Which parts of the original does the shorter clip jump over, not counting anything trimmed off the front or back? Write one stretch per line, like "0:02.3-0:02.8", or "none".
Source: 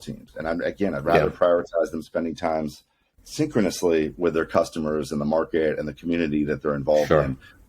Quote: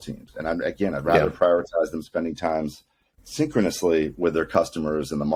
none